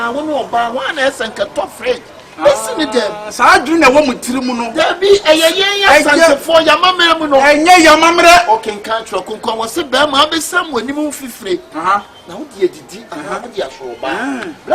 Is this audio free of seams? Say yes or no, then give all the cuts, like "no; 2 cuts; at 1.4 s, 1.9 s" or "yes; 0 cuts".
yes; 0 cuts